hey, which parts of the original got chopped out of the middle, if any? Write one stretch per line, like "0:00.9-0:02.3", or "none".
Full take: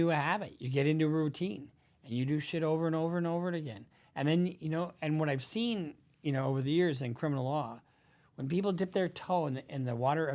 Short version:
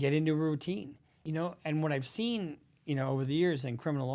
0:02.0-0:04.6